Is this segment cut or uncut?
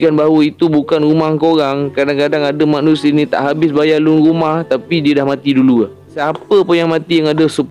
cut